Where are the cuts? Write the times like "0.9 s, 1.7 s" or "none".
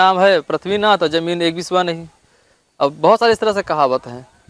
none